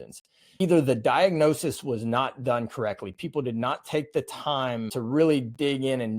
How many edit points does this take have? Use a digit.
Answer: 1